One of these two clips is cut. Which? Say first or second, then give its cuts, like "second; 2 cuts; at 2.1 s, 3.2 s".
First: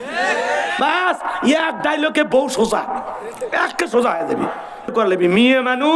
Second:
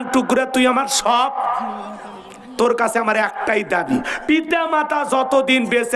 first; 1 cut; at 4.9 s